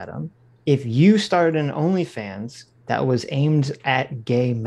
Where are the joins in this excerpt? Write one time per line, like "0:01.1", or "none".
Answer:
none